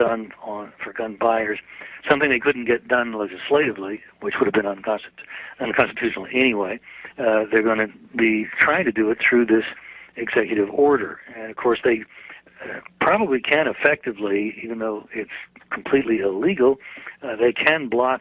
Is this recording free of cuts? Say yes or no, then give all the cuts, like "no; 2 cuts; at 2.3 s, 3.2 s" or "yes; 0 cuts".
no; 1 cut; at 16.0 s